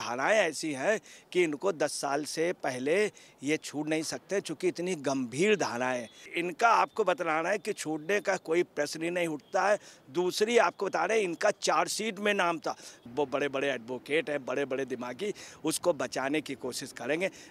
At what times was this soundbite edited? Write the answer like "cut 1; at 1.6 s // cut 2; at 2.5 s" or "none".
cut 1; at 6.4 s // cut 2; at 13.0 s